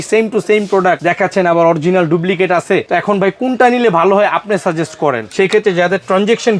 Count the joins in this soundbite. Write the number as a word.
three